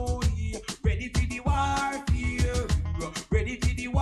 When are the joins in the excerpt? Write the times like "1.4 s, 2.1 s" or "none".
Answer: 1.3 s

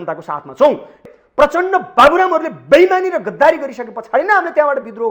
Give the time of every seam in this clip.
1.0 s

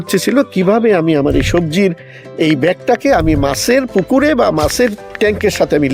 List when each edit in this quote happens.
none

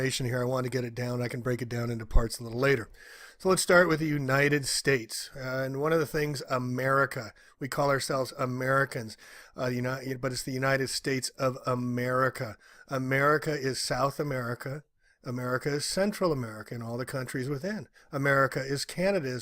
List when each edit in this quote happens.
16.2 s

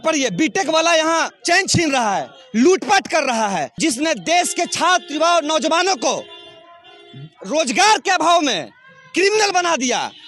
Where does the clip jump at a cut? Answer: 1.4 s, 3.7 s

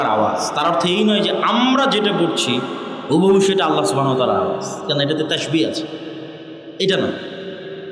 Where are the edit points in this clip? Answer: none

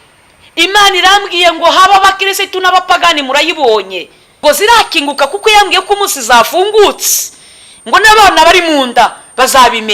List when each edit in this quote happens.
4.4 s

